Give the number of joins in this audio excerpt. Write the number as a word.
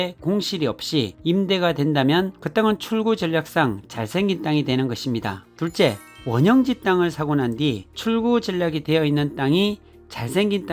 one